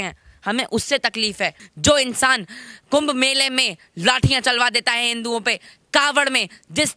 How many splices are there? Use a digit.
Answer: 1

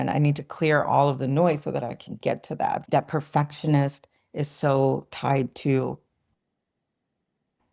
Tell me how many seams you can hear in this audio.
1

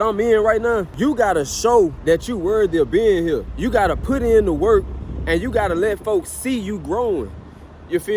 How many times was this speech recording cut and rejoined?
3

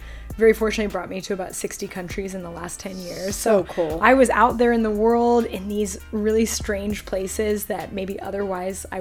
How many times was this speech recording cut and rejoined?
0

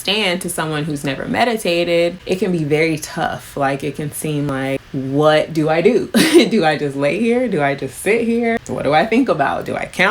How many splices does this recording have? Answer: 3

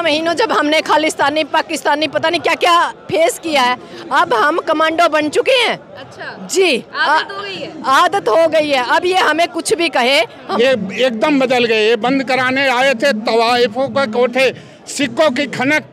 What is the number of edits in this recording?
1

